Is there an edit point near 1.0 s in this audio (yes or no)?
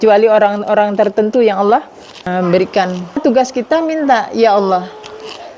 no